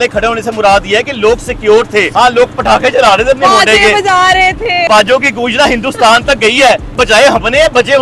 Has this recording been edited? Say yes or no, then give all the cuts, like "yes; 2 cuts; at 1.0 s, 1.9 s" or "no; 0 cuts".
yes; 3 cuts; at 2.1 s, 4.9 s, 7.0 s